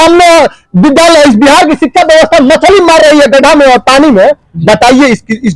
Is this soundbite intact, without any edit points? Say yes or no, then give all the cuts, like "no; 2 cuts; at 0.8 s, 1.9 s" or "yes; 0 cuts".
yes; 0 cuts